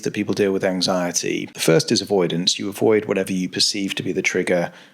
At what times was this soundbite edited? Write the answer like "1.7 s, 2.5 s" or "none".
1.5 s